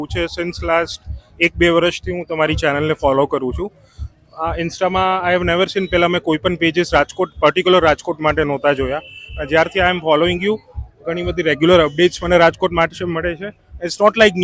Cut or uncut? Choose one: uncut